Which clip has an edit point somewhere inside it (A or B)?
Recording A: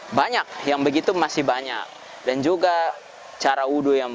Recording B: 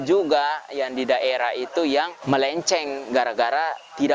B